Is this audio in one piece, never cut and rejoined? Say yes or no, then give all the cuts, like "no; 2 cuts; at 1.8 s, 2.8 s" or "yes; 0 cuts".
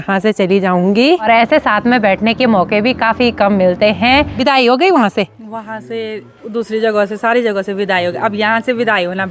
no; 2 cuts; at 1.2 s, 4.3 s